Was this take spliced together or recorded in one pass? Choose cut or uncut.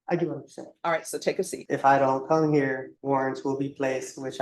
cut